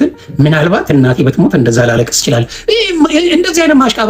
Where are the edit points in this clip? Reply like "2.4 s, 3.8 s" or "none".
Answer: none